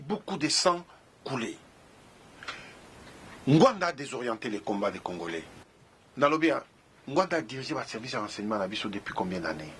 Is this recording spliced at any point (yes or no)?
yes